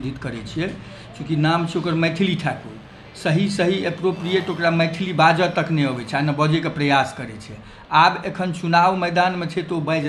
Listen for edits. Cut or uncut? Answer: uncut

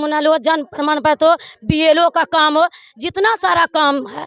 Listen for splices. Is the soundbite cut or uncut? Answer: uncut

